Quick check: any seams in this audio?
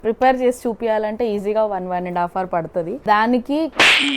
yes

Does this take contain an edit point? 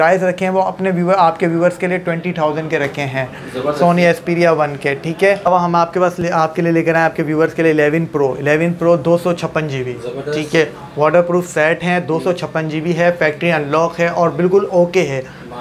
yes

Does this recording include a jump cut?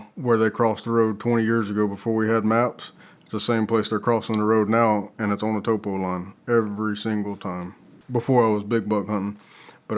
yes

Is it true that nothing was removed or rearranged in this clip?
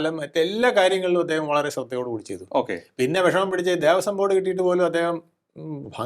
yes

